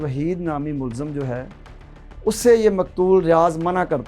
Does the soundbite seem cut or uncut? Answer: uncut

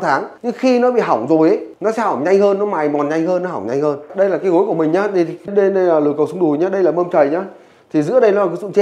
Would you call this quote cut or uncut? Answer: uncut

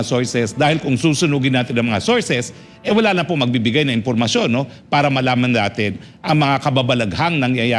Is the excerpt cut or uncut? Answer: uncut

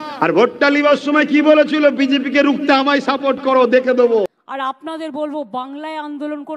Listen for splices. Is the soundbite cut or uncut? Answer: uncut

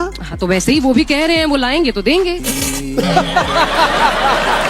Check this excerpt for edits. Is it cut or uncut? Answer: uncut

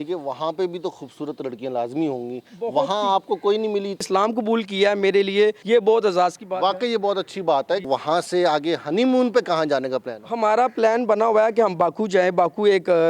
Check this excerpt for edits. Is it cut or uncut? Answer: cut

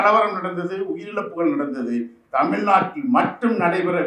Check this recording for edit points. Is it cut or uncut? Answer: uncut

